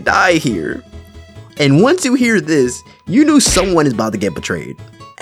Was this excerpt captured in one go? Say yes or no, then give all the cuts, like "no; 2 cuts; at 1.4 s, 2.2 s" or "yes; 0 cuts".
yes; 0 cuts